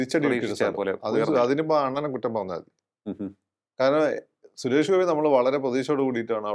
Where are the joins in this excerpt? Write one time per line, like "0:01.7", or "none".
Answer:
none